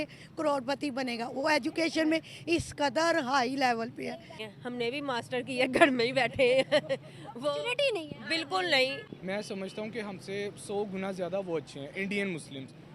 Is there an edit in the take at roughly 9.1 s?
yes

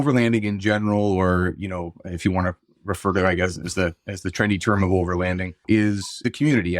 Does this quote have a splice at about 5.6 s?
yes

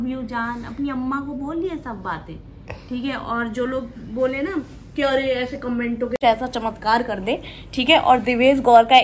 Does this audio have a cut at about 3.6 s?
no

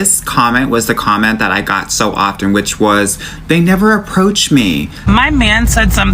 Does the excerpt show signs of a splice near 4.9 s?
yes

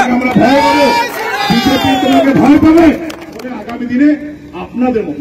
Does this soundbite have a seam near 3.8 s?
yes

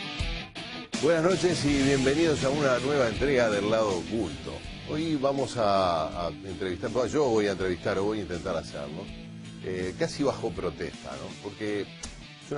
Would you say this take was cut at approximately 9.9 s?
yes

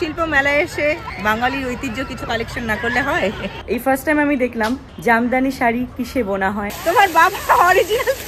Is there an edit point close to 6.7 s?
yes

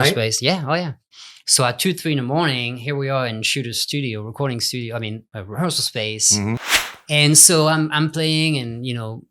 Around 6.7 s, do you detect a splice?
yes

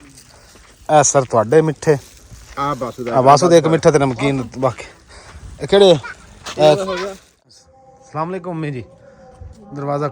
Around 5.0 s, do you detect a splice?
no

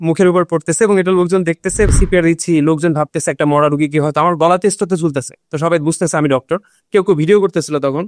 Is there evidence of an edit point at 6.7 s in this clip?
no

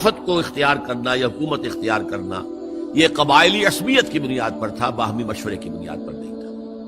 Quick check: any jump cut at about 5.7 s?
yes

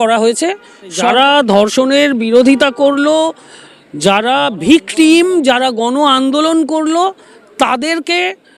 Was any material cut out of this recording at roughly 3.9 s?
no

